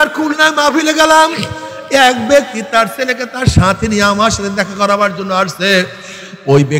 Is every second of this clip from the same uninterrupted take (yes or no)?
yes